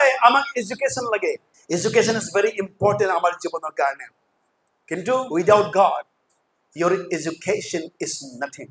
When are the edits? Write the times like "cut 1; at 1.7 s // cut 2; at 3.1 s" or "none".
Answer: cut 1; at 1.5 s // cut 2; at 5.3 s